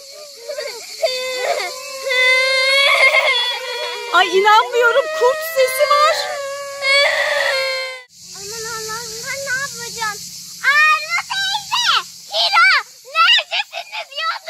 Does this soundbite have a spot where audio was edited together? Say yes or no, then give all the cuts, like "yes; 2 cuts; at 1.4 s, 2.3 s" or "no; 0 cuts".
yes; 1 cut; at 7.9 s